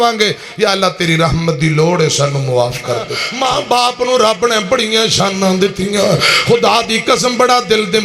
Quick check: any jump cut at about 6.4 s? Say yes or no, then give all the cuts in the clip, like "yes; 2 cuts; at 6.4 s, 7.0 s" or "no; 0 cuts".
no; 1 cut; at 3.2 s